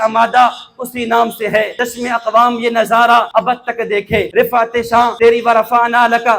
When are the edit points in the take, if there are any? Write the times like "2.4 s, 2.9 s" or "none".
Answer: 1.7 s, 3.3 s, 4.3 s, 5.1 s